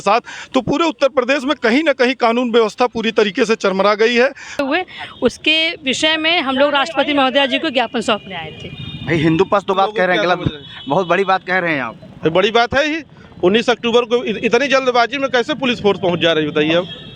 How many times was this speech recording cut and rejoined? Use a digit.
2